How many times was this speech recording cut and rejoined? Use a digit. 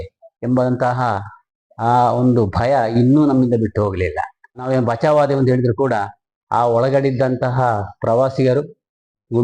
1